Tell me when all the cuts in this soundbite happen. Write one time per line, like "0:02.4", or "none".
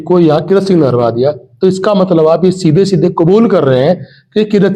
none